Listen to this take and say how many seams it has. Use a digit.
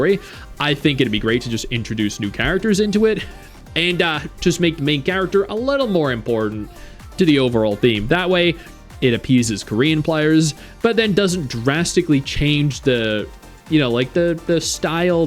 0